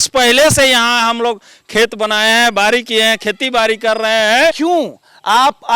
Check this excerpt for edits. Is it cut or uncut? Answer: cut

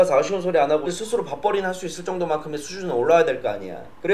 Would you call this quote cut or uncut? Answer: cut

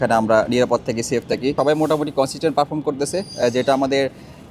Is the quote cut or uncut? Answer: cut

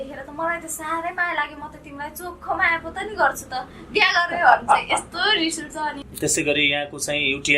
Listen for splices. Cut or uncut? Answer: cut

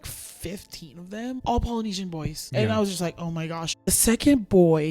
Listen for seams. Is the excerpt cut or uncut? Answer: cut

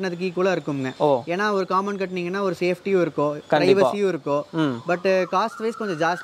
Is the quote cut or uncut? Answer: uncut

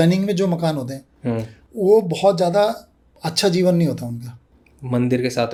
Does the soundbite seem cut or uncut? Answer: uncut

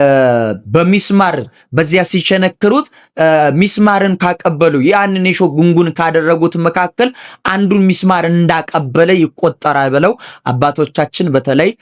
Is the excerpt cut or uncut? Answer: uncut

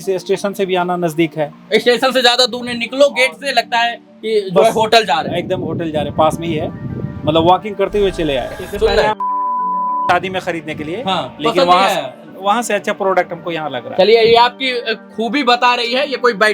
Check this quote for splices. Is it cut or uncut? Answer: cut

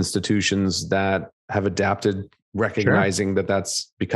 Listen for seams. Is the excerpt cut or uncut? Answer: cut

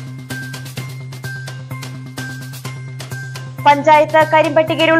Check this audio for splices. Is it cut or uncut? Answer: uncut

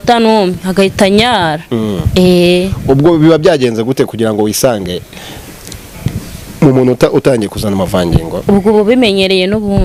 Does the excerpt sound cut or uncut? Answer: uncut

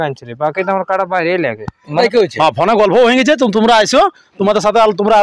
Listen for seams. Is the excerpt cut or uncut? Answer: cut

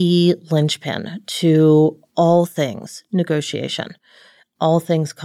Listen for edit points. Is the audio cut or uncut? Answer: uncut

